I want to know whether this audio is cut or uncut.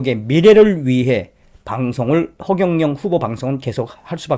uncut